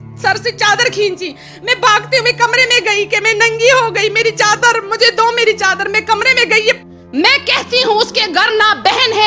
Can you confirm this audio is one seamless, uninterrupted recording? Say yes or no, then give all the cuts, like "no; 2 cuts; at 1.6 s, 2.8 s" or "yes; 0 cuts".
no; 1 cut; at 6.8 s